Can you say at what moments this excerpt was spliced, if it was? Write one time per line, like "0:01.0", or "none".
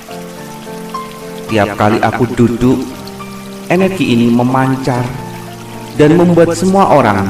0:01.2